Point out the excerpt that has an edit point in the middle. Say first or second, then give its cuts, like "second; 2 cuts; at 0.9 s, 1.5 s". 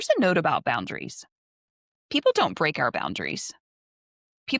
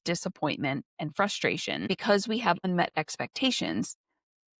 second; 2 cuts; at 0.9 s, 1.9 s